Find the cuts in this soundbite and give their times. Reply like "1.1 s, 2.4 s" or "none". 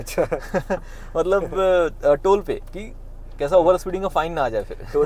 none